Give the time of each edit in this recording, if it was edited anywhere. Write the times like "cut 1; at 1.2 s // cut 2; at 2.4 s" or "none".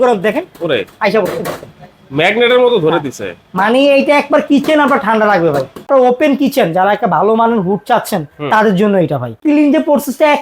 cut 1; at 5.9 s // cut 2; at 9.4 s